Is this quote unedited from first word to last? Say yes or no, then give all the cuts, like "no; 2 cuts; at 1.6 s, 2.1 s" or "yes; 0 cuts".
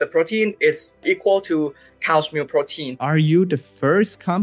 no; 2 cuts; at 1.0 s, 3.0 s